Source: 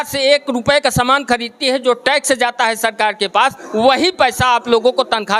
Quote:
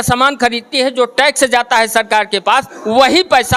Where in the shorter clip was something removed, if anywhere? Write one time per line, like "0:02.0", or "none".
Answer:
none

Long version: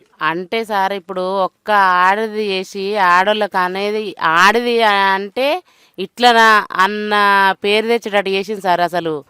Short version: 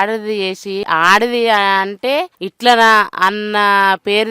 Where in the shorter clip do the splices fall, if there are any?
0:00.8
0:02.4

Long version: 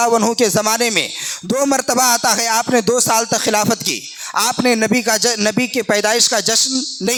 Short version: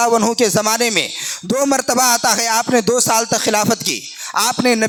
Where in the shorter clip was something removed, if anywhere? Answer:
none

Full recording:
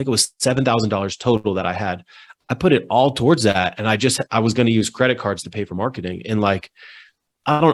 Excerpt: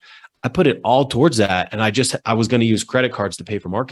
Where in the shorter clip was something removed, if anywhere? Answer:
none

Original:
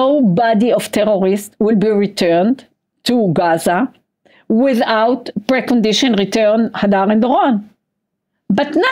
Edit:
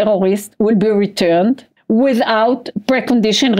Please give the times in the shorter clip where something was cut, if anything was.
0:01.7

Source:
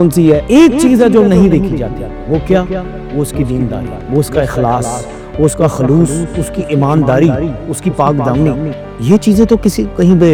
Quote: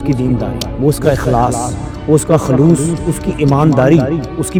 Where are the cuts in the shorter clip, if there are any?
none

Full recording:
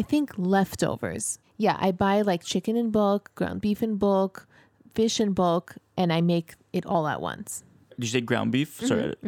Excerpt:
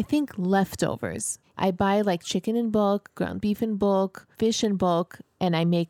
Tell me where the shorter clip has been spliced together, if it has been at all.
0:01.6
0:04.2

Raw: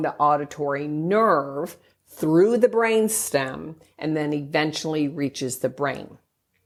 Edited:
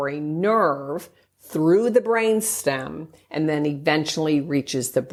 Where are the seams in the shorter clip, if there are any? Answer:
none

